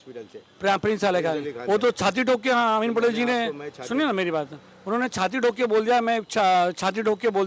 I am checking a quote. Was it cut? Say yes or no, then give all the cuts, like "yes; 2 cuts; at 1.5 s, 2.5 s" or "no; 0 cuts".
no; 0 cuts